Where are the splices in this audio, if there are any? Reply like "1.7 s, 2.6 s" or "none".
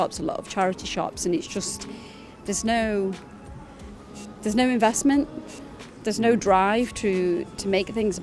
none